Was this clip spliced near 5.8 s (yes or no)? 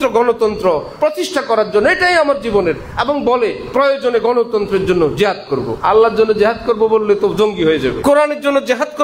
yes